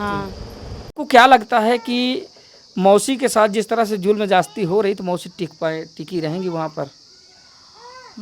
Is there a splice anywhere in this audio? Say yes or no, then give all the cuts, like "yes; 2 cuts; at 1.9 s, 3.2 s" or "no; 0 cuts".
yes; 1 cut; at 1.0 s